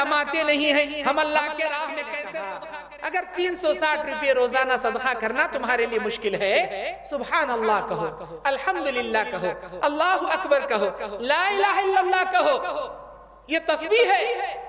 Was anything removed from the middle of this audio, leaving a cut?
yes; 1 cut; at 2.6 s

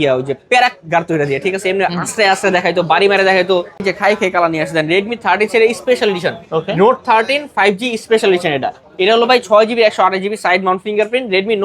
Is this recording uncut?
no; 1 cut; at 3.9 s

